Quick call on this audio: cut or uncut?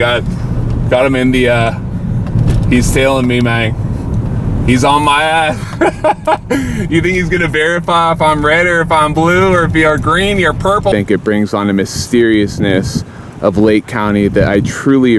cut